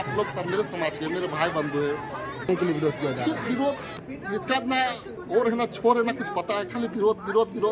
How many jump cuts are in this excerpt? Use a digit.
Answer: 1